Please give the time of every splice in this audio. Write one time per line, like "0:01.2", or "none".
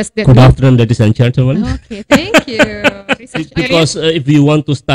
0:03.5

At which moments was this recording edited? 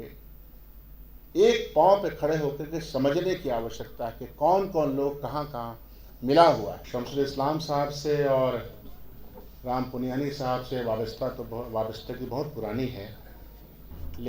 0:06.8

